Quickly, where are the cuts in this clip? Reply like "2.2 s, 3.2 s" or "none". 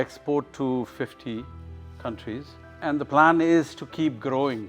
none